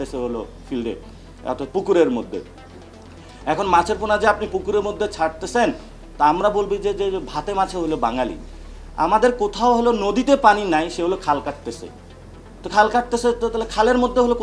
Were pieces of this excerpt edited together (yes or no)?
no